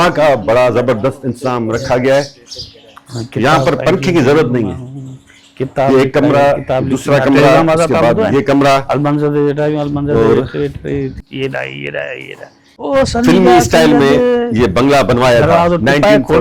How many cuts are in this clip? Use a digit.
2